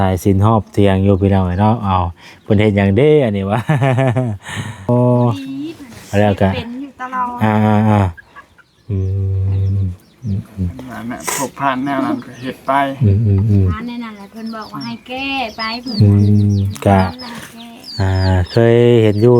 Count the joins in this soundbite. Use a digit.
1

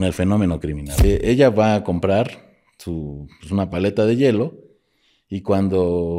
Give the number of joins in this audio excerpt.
1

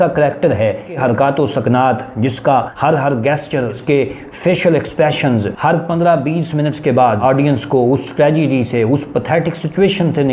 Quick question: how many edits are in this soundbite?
4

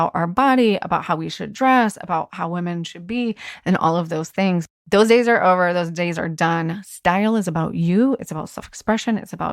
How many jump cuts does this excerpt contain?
1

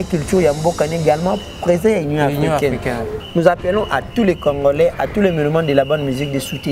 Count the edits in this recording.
1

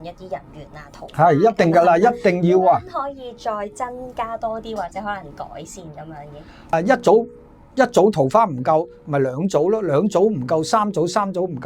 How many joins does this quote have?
1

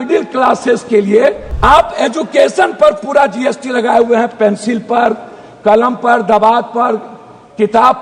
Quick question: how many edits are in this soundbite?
1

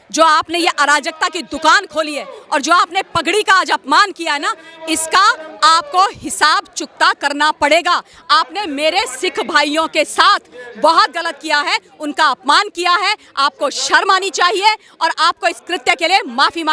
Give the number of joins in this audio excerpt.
0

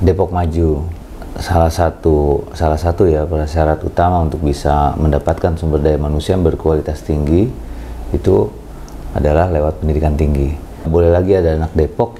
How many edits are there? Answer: 2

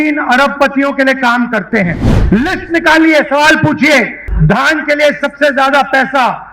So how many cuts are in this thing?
2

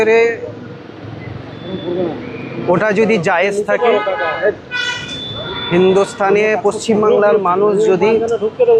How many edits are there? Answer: 0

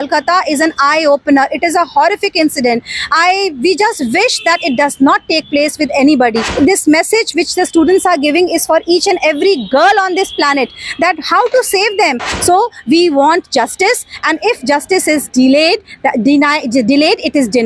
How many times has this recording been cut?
2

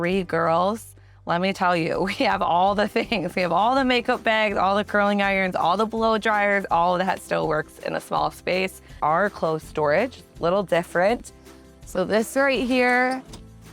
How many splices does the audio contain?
1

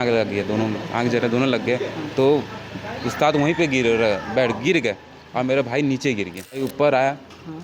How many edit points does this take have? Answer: 1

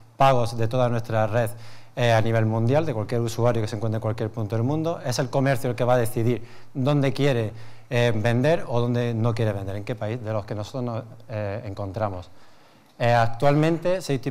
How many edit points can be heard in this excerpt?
1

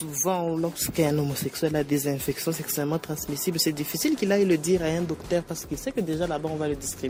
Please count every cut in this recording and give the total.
0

